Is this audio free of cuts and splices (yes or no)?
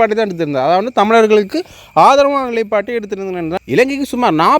no